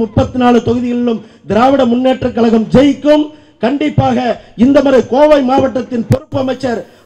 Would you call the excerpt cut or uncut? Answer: uncut